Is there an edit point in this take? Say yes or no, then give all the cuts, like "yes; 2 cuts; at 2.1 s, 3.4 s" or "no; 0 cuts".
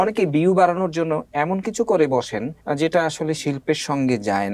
yes; 1 cut; at 2.5 s